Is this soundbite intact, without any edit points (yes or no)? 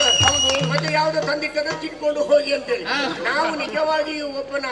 yes